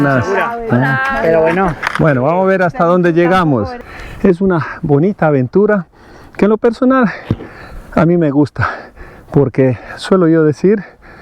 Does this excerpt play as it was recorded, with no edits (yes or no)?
no